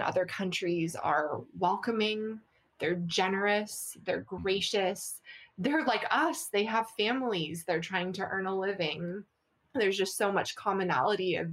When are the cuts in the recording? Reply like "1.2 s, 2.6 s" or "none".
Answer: none